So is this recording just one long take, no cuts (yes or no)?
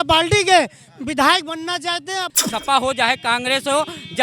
no